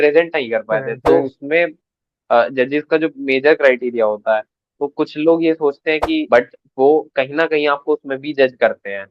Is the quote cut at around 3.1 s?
no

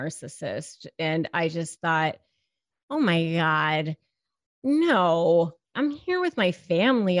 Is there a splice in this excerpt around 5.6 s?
yes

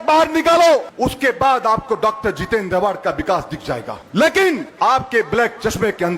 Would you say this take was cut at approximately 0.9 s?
yes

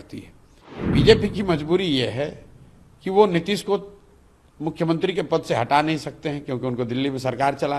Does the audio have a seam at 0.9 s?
yes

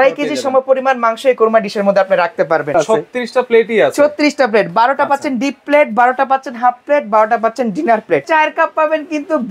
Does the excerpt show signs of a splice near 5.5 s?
no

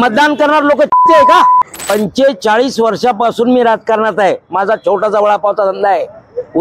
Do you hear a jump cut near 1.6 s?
yes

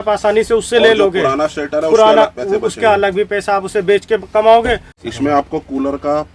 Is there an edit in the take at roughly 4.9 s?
yes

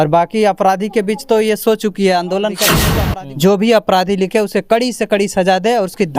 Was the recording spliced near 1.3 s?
no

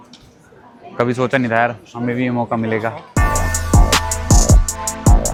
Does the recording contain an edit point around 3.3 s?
no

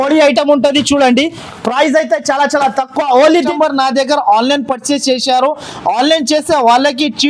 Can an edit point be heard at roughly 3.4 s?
yes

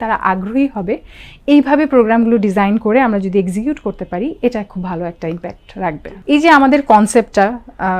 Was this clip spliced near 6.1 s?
yes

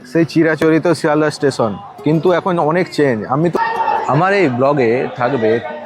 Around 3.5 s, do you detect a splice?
yes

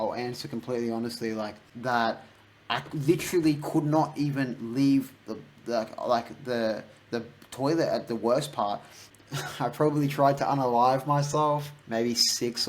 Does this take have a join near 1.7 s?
yes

